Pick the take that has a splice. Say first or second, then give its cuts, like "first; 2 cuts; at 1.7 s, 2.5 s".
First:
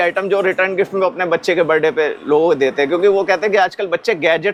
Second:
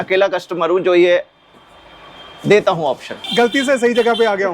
second; 1 cut; at 3.3 s